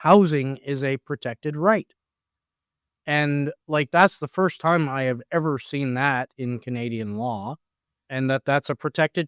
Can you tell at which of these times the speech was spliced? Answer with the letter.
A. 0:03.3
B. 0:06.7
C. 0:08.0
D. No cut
C